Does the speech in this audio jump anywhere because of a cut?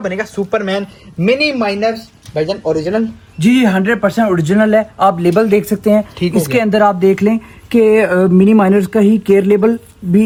no; 0 cuts

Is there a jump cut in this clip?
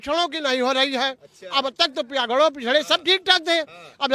no; 0 cuts

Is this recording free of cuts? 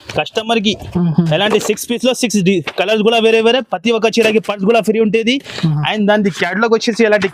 yes; 0 cuts

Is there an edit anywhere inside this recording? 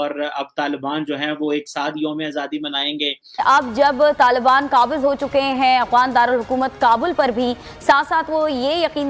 yes; 1 cut; at 3.2 s

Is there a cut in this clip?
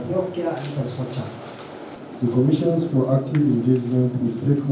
yes; 1 cut; at 2.0 s

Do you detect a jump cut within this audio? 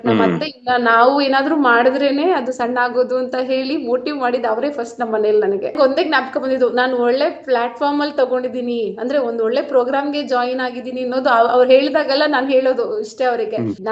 yes; 1 cut; at 5.7 s

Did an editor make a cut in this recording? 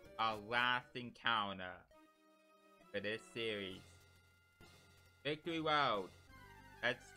no; 0 cuts

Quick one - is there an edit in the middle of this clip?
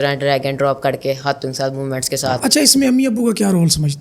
yes; 1 cut; at 2.5 s

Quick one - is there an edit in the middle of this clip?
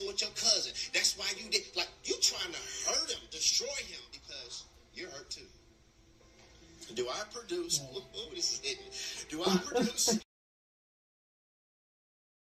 no; 0 cuts

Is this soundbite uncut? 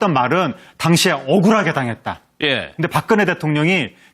no; 1 cut; at 1.5 s

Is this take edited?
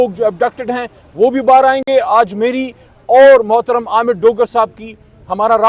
no; 0 cuts

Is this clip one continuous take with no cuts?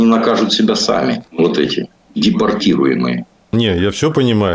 no; 2 cuts; at 1.3 s, 3.5 s

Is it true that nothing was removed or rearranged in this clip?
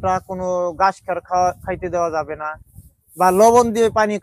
yes; 0 cuts

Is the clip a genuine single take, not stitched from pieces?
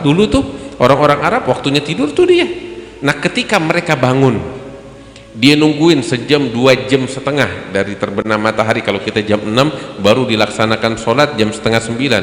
yes; 0 cuts

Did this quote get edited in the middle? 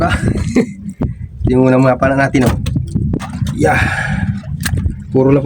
yes; 1 cut; at 3.3 s

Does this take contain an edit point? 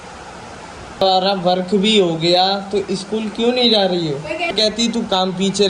yes; 2 cuts; at 1.0 s, 4.5 s

